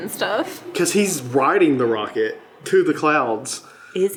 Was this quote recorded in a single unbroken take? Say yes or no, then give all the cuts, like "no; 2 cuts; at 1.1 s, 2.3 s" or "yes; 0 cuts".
yes; 0 cuts